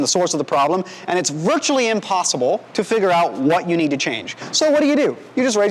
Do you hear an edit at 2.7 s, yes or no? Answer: yes